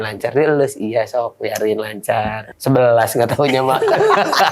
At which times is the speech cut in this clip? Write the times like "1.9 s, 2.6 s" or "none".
2.5 s, 3.8 s